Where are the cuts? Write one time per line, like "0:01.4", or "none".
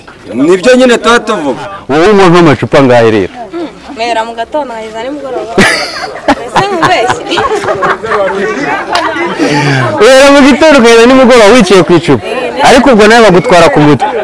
0:01.8